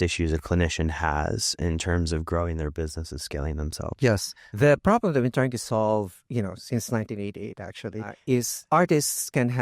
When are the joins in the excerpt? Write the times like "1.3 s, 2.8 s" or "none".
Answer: 4.4 s, 8.4 s